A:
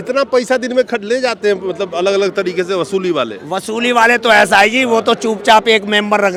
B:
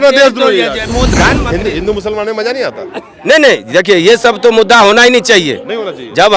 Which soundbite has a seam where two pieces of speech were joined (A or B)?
B